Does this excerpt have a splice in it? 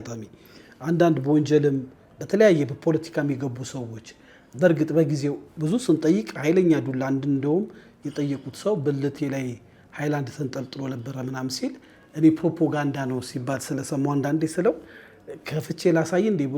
no; 0 cuts

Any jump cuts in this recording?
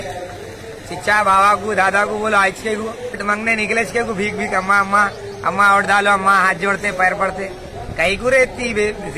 yes; 1 cut; at 3.2 s

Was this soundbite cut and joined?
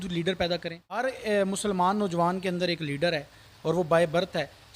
yes; 1 cut; at 1.0 s

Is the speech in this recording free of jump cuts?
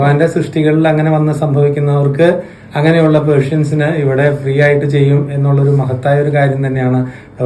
yes; 0 cuts

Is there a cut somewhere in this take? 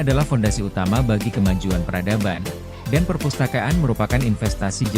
no; 0 cuts

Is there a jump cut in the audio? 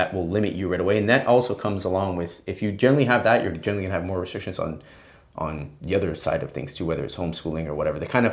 no; 0 cuts

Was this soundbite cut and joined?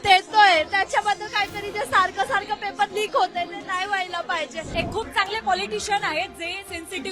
yes; 1 cut; at 4.7 s

